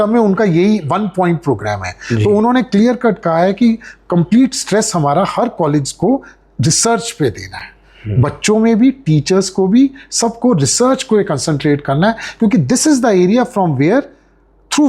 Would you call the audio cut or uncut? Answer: uncut